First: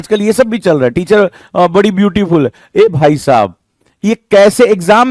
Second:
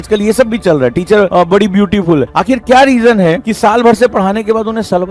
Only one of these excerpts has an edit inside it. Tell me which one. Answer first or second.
second